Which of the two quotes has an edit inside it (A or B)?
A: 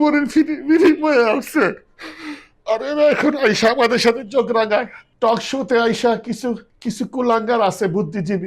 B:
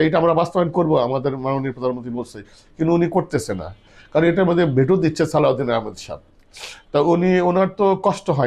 A